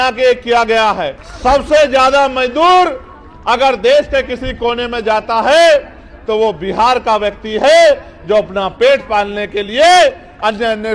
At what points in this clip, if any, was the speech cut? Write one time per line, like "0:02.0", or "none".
0:01.2

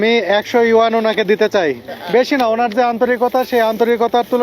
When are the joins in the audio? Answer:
0:01.9

